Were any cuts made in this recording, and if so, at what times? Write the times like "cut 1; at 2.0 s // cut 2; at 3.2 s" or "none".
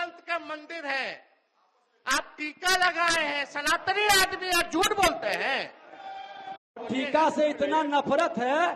cut 1; at 6.9 s